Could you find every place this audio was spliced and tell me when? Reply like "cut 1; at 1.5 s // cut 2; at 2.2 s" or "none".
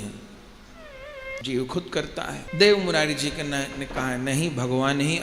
cut 1; at 1.4 s // cut 2; at 2.4 s